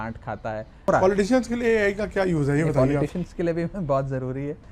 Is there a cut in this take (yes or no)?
yes